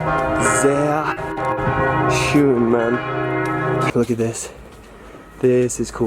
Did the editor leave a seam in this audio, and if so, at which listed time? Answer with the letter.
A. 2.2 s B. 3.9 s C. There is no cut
B